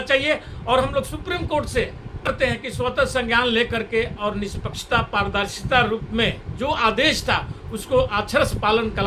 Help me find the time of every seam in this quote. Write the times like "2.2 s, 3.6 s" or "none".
2.3 s